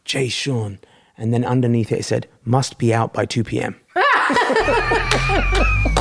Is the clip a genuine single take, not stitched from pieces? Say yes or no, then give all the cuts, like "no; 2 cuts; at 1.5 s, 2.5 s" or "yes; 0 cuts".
yes; 0 cuts